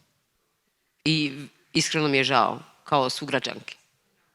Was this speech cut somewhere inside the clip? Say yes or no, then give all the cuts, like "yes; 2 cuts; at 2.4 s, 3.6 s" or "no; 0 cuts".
no; 0 cuts